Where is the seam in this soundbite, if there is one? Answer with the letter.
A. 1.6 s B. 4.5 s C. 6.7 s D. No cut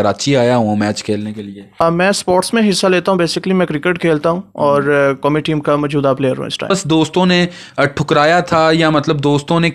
C